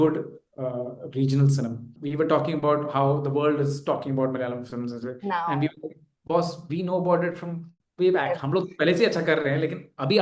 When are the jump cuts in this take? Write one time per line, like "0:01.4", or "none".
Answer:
0:01.9